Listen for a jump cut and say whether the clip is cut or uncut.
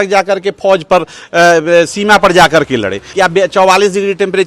cut